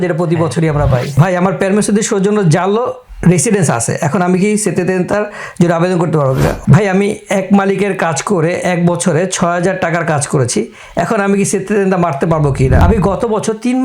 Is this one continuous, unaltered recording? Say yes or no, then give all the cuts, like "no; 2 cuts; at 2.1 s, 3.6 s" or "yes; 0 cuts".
no; 3 cuts; at 1.2 s, 6.6 s, 12.8 s